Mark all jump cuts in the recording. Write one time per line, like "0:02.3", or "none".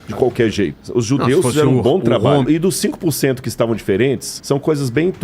0:02.4
0:04.3